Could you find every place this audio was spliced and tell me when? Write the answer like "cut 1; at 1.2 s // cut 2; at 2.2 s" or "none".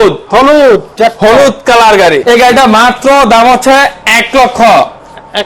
cut 1; at 2.2 s